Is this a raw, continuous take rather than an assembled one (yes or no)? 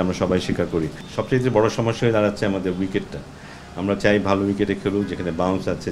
no